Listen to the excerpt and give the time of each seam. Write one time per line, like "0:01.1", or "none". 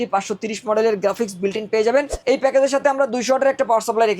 0:02.2